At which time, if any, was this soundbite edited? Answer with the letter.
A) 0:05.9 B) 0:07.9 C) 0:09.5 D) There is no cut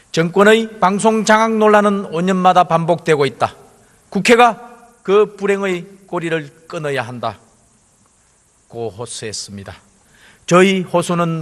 D